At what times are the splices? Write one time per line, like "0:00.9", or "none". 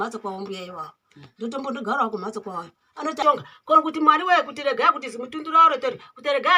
0:03.2